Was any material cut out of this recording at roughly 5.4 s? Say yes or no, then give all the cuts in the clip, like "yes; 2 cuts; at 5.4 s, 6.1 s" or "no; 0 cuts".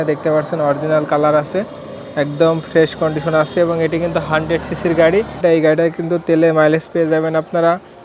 yes; 1 cut; at 5.4 s